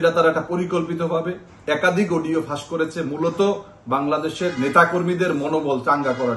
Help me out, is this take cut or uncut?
uncut